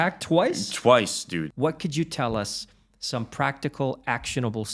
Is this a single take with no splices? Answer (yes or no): no